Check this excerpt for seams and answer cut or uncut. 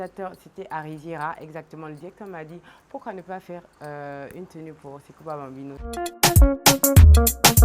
cut